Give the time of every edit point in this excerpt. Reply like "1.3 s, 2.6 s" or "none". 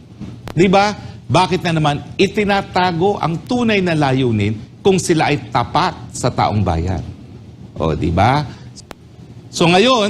8.6 s